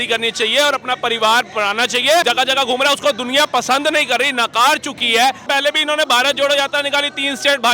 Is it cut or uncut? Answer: cut